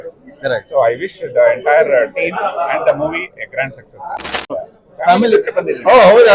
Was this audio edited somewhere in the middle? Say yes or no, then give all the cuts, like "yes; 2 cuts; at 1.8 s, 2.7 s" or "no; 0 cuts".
yes; 1 cut; at 4.4 s